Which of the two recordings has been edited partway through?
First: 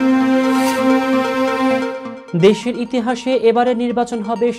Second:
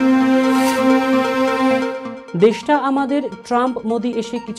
second; 1 cut; at 2.1 s

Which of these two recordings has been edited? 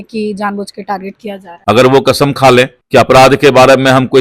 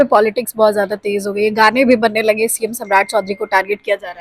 first; 2 cuts; at 1.5 s, 2.8 s

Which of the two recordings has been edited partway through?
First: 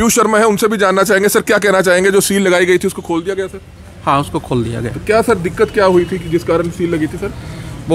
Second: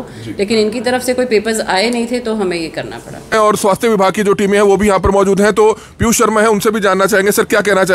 second; 1 cut; at 3.3 s

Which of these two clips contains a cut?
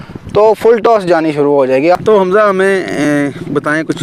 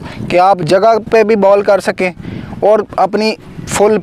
first; 1 cut; at 2.0 s

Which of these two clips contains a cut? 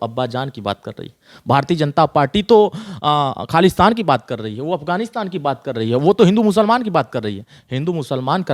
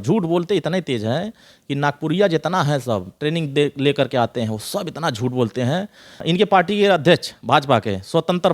second; 1 cut; at 6.2 s

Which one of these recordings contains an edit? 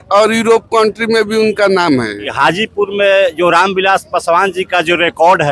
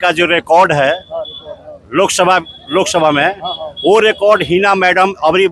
first; 1 cut; at 2.2 s

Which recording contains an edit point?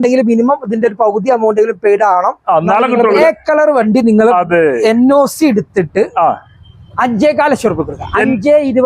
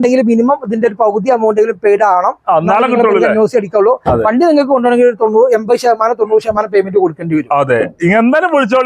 first; 1 cut; at 3.2 s

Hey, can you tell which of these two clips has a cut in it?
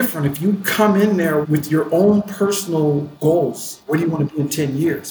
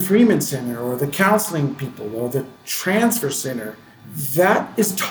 first; 3 cuts; at 1.4 s, 3.1 s, 3.8 s

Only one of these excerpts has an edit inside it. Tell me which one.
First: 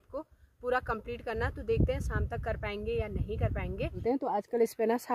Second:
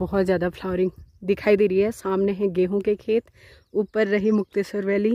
first; 1 cut; at 4.0 s

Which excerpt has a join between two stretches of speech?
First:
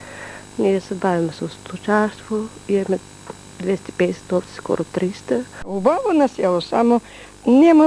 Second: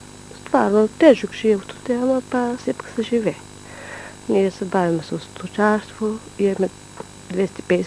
first; 1 cut; at 5.7 s

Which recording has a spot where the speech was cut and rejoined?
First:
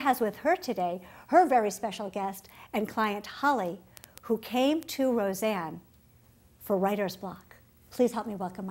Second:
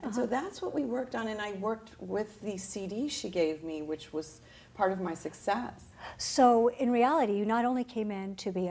first; 1 cut; at 4.4 s

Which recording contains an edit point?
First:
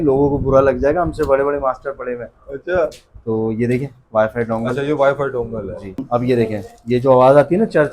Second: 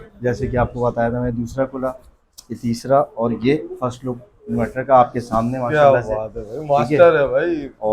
first; 1 cut; at 6.0 s

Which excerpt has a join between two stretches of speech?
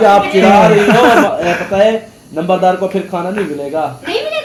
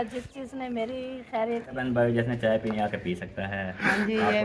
second; 1 cut; at 1.8 s

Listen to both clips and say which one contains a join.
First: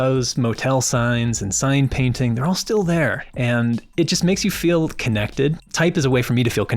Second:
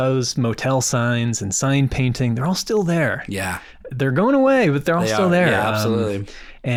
first; 2 cuts; at 3.2 s, 5.7 s

